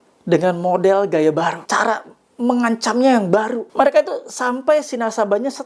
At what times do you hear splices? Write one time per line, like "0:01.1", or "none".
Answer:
0:01.6
0:03.6